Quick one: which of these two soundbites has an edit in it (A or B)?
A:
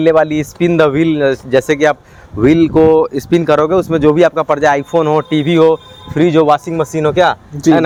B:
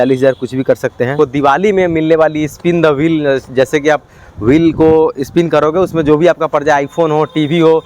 B